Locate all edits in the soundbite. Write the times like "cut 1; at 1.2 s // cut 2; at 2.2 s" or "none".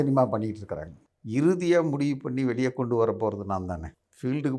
cut 1; at 0.9 s